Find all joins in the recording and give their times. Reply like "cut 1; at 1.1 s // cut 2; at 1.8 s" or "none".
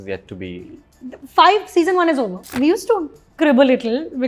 cut 1; at 2.5 s